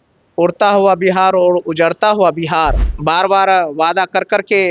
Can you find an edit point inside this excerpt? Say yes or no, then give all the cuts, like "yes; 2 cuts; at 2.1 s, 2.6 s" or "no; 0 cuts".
yes; 1 cut; at 2.9 s